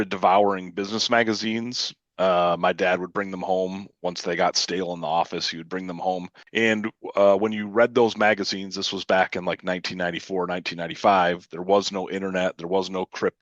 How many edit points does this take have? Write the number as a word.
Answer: one